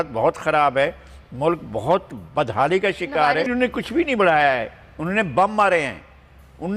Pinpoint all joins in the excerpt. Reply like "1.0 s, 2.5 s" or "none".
3.5 s